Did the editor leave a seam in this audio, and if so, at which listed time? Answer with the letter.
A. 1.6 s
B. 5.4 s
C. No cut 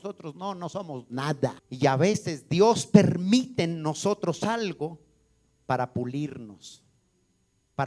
A